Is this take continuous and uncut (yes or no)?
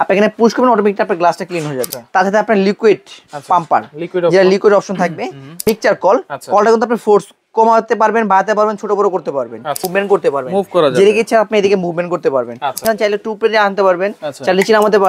no